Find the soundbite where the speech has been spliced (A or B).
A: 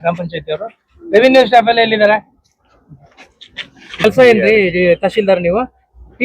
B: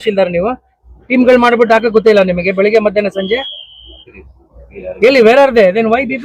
A